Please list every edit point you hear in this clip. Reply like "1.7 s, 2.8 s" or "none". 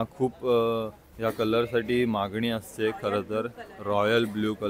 none